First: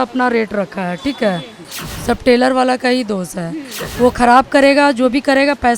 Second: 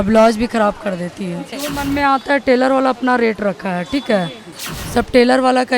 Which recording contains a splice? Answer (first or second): second